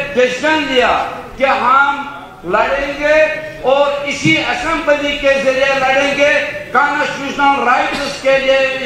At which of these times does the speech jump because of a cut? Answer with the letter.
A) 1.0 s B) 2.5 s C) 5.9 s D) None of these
D